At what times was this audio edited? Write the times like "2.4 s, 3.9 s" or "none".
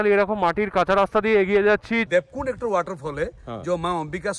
2.0 s